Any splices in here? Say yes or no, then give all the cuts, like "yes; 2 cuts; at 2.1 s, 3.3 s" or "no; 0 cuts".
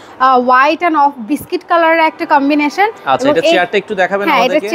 no; 0 cuts